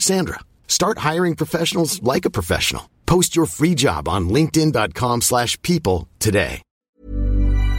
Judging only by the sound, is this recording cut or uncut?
cut